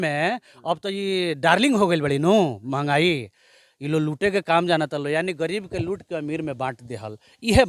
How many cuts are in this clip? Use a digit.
0